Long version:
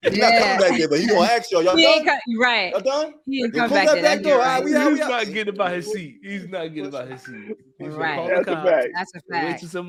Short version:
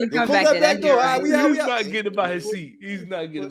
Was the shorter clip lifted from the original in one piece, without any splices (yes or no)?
yes